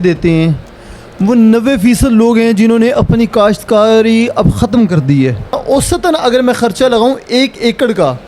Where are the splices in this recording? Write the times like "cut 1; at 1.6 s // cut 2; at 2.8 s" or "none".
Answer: cut 1; at 5.6 s